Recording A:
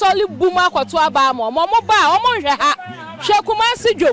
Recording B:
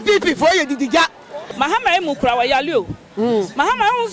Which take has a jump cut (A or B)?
B